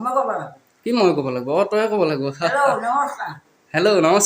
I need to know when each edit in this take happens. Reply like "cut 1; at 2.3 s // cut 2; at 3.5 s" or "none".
none